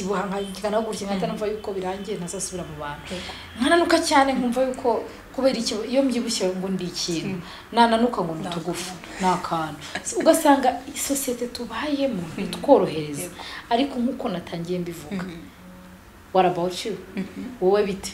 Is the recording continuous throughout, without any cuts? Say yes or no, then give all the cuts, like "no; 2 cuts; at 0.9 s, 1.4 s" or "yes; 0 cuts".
yes; 0 cuts